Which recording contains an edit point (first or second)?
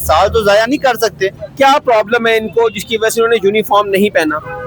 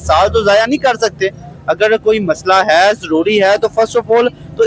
first